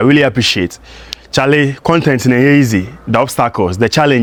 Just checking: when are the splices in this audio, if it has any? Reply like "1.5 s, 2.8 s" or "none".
none